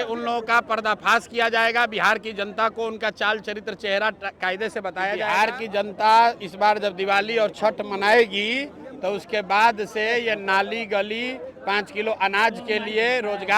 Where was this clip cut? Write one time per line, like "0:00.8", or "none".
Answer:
0:05.2

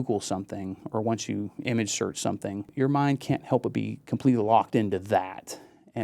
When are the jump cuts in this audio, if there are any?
0:02.7

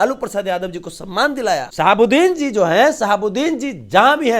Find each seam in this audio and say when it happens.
0:01.7

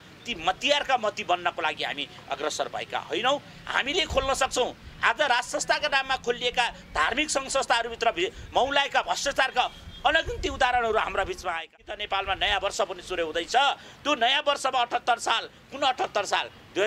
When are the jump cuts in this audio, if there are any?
0:11.7

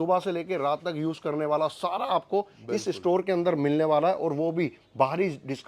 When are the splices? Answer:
none

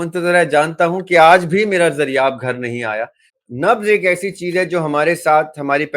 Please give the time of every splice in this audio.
0:03.3

